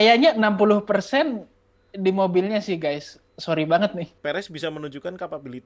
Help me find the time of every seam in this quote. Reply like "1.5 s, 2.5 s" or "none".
4.1 s